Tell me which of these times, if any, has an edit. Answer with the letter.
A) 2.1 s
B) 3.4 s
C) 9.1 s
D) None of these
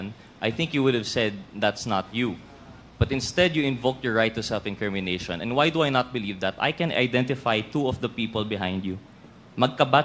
D